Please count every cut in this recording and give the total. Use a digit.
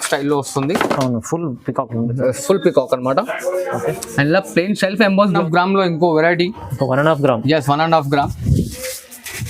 1